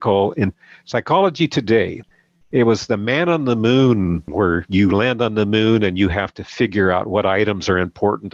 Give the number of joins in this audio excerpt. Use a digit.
1